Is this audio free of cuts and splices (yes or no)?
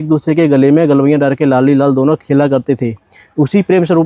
yes